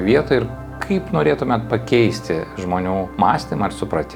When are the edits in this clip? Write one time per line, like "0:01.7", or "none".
0:03.1